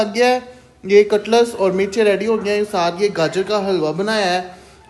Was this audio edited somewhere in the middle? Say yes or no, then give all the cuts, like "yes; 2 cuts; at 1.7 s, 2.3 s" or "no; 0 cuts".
no; 0 cuts